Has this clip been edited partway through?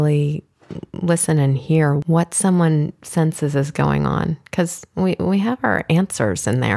yes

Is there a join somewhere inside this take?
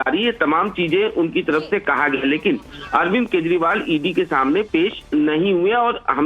yes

